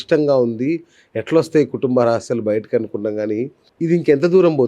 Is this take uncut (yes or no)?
no